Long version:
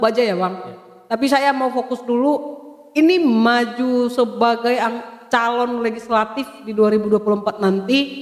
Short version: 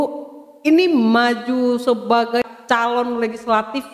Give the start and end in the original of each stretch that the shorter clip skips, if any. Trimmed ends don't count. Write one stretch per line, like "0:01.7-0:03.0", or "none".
0:04.7-0:05.1